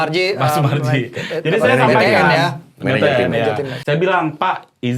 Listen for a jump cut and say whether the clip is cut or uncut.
cut